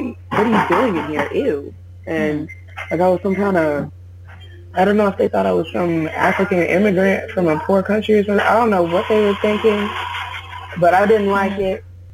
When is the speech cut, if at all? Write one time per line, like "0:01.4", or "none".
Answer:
none